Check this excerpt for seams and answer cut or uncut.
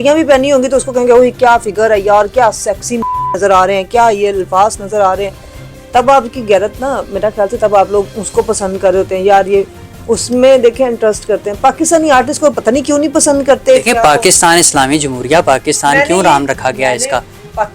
uncut